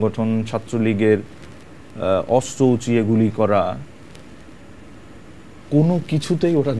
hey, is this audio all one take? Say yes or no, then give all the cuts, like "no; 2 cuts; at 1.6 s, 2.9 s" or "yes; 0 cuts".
yes; 0 cuts